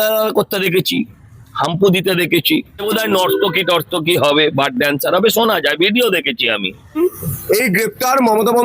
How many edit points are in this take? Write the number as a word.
two